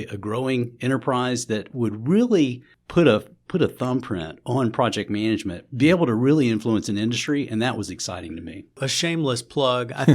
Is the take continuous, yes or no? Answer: no